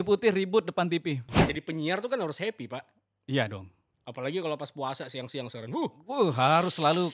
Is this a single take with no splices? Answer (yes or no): no